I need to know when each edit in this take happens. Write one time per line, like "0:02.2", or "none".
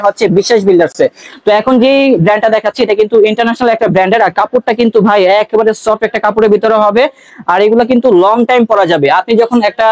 none